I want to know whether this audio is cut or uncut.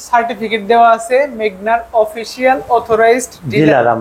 uncut